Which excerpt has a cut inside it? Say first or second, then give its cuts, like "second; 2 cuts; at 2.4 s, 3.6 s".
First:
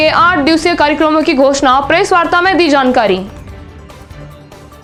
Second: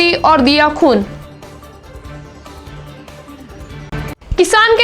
second; 1 cut; at 3.9 s